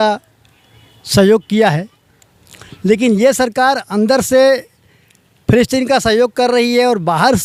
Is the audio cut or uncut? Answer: uncut